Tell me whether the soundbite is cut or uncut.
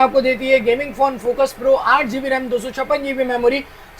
uncut